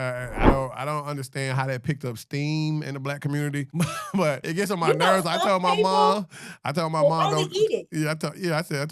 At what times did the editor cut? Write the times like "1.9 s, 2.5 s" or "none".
4.1 s

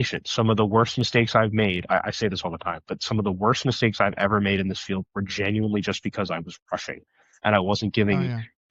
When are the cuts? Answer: none

